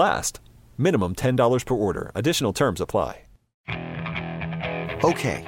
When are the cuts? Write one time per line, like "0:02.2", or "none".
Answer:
0:03.5